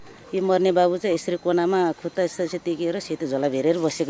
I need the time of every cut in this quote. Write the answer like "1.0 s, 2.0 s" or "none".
none